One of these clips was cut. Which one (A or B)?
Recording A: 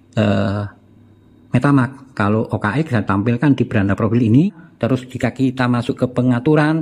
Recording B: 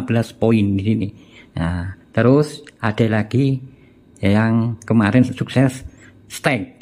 A